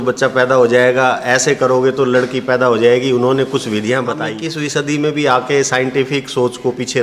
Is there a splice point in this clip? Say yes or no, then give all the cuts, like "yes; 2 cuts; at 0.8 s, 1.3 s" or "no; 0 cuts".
yes; 1 cut; at 4.3 s